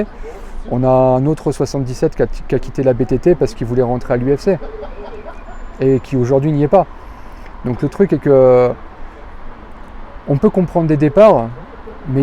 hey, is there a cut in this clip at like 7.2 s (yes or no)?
no